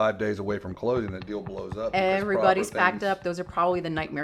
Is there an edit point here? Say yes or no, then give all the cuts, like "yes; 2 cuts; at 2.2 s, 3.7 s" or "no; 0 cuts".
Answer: no; 0 cuts